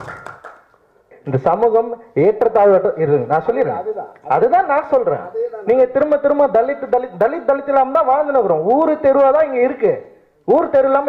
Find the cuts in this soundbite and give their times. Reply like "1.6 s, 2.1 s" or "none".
none

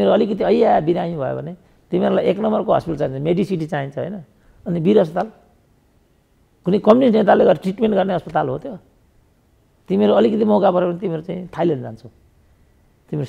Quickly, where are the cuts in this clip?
none

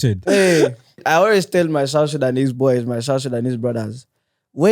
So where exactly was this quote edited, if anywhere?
1.0 s

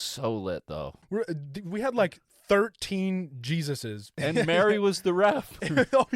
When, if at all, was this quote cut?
1.0 s, 4.1 s

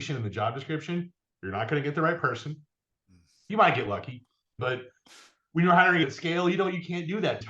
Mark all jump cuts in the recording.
3.5 s, 4.5 s, 6.0 s

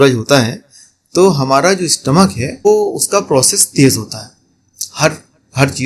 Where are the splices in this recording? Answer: 2.7 s

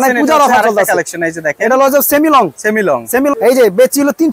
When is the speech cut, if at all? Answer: 3.3 s

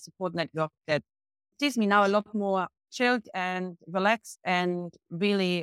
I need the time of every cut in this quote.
1.5 s

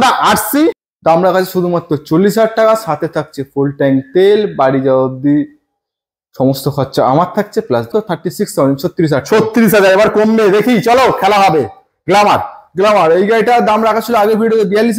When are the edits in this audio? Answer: 0.9 s, 7.9 s

